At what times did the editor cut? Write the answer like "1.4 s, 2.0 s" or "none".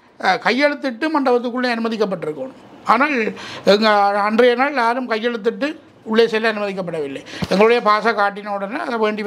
none